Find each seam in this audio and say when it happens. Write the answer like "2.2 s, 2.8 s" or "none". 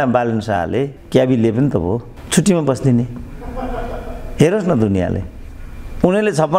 1.0 s, 2.2 s